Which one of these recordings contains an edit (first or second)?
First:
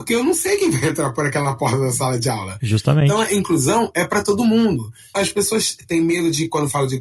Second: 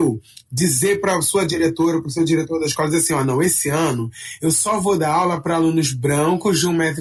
first